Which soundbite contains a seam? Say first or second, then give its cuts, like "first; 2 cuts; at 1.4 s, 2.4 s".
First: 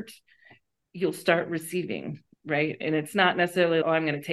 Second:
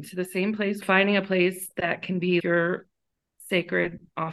second; 2 cuts; at 0.8 s, 2.4 s